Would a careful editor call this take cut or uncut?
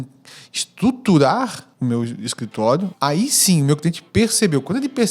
cut